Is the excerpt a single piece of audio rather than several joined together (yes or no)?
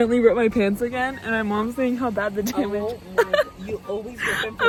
yes